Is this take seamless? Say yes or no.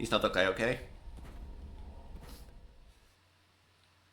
no